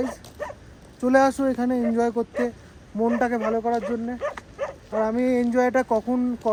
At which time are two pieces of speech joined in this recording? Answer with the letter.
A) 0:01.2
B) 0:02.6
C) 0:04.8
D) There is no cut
D